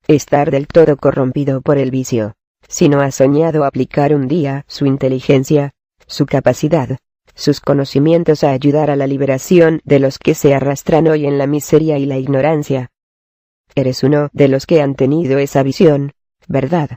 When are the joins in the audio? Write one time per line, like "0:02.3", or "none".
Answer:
0:06.0